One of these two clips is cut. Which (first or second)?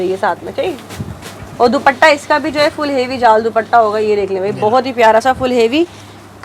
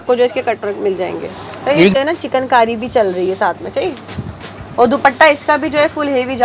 second